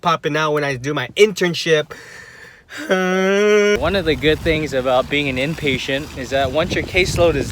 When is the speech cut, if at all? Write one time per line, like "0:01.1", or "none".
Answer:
0:03.8